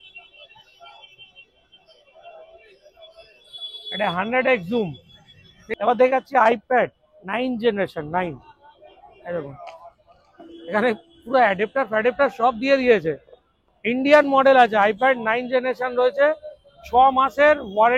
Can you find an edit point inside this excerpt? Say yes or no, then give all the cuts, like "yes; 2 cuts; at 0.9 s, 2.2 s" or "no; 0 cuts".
yes; 1 cut; at 5.6 s